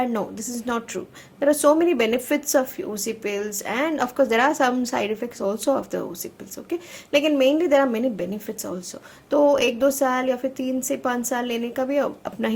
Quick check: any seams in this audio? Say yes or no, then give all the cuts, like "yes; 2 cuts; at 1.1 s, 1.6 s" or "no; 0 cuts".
no; 0 cuts